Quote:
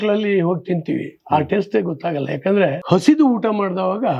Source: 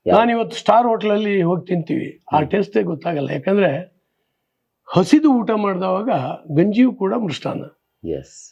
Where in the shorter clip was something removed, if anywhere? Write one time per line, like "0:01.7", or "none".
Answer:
0:02.8

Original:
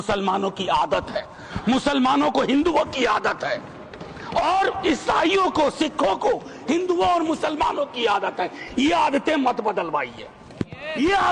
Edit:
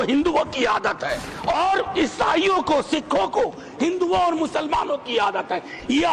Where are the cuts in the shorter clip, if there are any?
0:01.3

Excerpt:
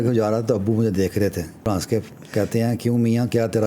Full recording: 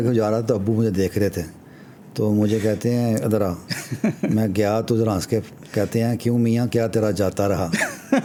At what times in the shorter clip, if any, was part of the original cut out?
0:01.7

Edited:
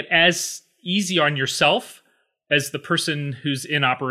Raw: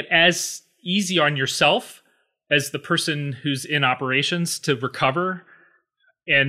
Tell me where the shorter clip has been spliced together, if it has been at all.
none

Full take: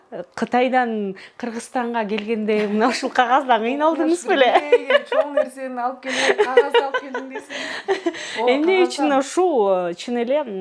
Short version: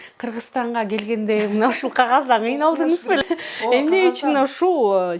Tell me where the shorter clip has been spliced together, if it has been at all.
0:03.2

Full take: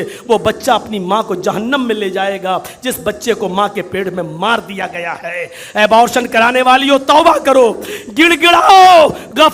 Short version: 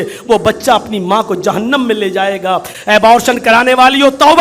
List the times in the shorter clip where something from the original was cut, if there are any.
0:02.7

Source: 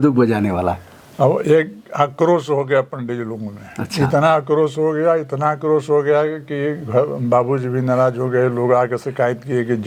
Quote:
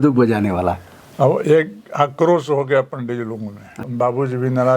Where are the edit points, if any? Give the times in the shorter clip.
0:03.9

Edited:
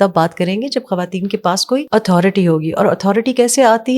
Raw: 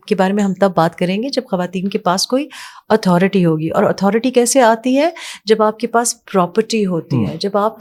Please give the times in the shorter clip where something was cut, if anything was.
0:01.8

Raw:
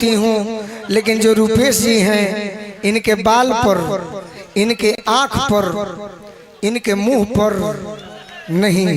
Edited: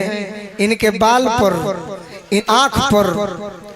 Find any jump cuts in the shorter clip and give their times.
0:02.4

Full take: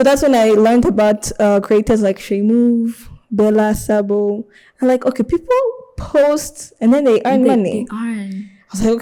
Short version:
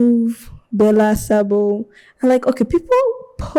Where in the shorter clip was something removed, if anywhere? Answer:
none

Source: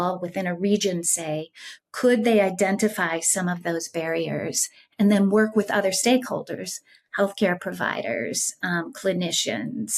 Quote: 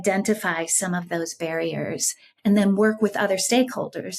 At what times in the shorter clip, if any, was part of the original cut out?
none

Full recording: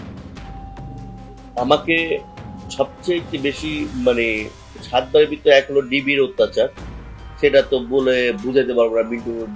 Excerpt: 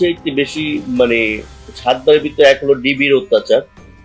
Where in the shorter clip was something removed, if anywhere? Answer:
none

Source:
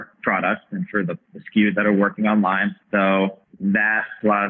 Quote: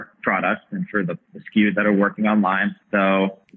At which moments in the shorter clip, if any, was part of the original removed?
none

